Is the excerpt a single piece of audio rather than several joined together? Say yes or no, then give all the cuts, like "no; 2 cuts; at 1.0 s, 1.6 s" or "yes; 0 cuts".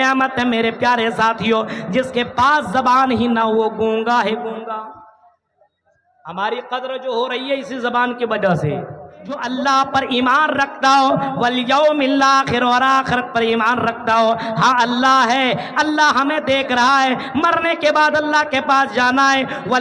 no; 1 cut; at 9.4 s